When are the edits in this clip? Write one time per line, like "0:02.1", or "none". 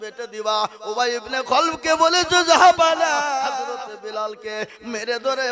0:03.4